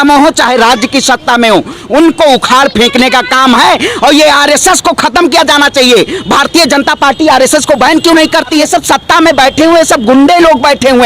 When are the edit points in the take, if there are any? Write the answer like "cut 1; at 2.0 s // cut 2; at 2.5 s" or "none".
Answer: cut 1; at 8.5 s